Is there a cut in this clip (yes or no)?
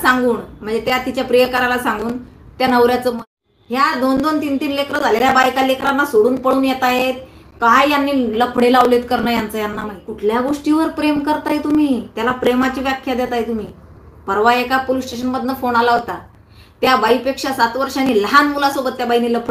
yes